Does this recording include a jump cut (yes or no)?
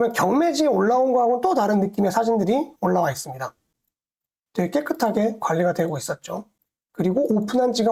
no